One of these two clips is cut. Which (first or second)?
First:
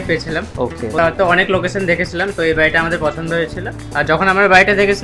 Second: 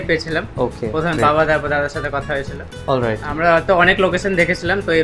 first